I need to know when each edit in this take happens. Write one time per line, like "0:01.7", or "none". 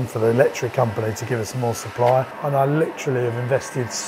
0:02.4